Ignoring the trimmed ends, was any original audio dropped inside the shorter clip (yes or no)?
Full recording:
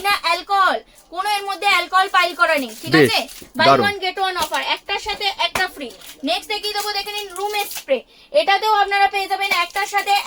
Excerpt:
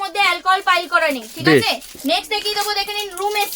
yes